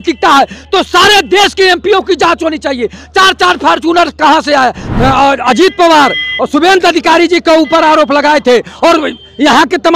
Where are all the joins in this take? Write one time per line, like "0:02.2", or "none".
0:04.8